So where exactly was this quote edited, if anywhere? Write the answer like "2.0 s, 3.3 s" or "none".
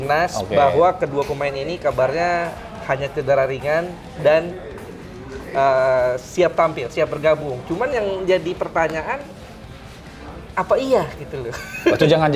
none